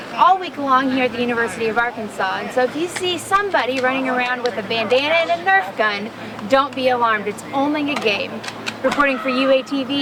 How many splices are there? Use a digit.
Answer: 0